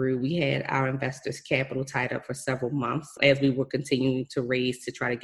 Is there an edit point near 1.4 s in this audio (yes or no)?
no